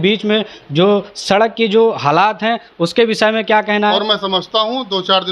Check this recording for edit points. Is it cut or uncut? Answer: cut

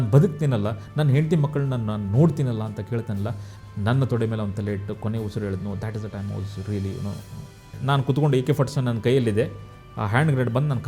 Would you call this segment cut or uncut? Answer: cut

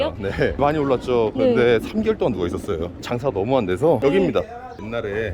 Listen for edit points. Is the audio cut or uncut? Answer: cut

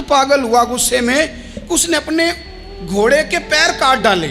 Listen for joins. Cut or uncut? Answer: uncut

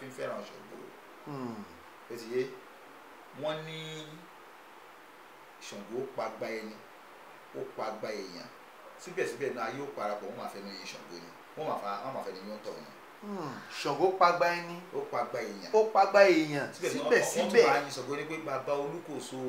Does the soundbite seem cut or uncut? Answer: uncut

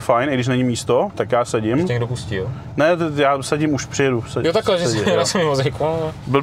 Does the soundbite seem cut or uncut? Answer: uncut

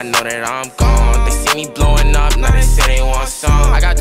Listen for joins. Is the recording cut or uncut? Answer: uncut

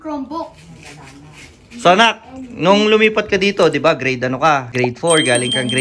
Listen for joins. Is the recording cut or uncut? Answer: cut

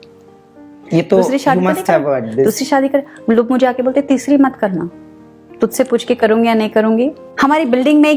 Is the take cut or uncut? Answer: cut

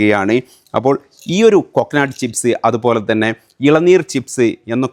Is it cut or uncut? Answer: uncut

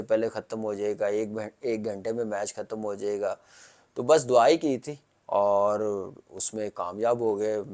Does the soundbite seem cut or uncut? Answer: uncut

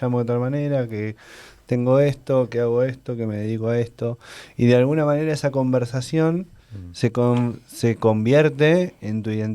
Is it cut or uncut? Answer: uncut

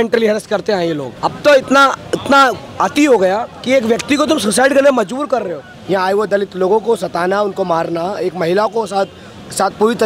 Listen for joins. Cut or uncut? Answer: cut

